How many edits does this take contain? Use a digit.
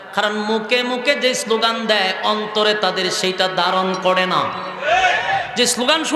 0